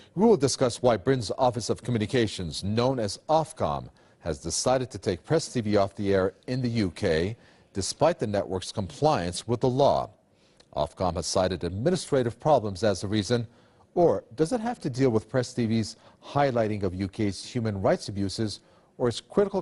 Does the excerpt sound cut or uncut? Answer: cut